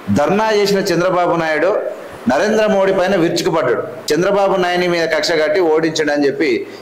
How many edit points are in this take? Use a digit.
1